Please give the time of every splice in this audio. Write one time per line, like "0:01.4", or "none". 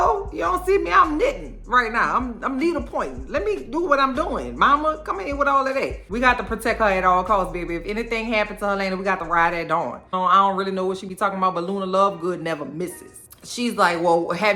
none